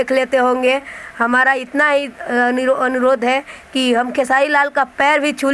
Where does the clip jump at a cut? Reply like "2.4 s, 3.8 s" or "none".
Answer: 1.0 s